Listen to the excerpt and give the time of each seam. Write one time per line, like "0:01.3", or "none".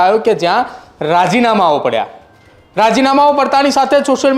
none